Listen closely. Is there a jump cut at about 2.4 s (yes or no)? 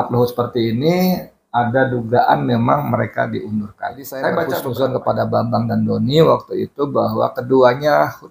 no